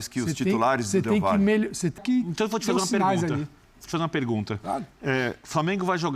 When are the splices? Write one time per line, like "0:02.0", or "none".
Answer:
0:02.0

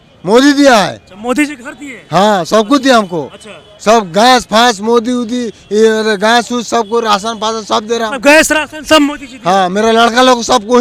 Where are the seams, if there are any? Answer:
none

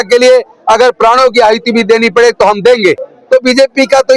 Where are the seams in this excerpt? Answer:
0:03.1

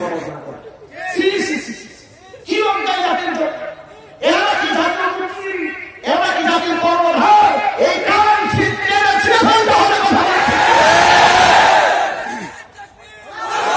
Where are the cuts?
none

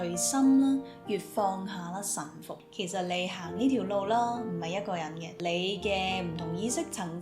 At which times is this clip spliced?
0:02.6
0:05.4

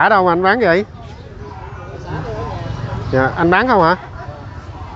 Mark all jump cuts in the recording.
none

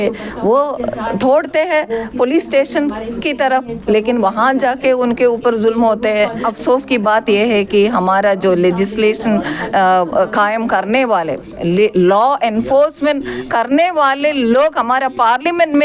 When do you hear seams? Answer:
0:06.5

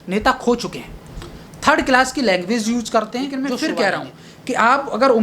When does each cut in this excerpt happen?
0:03.3

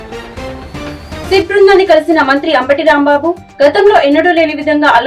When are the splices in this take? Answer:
0:01.2

